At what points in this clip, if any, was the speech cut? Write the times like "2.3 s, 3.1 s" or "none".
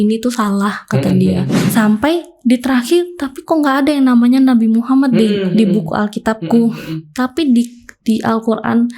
1.6 s